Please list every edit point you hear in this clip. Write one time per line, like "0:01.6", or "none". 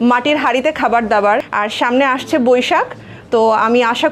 0:01.5